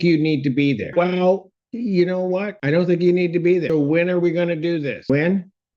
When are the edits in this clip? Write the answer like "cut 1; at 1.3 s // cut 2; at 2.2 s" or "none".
cut 1; at 0.9 s // cut 2; at 2.5 s // cut 3; at 3.7 s // cut 4; at 5.1 s